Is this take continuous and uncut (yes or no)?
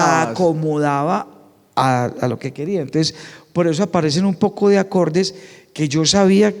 yes